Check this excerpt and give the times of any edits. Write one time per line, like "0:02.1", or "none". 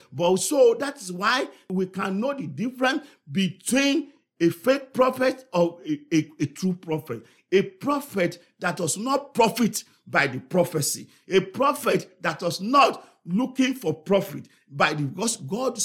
0:01.7